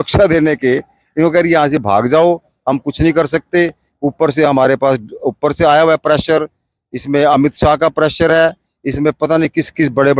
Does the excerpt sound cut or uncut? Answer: uncut